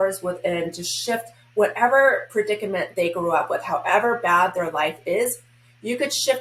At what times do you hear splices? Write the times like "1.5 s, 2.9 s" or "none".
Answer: none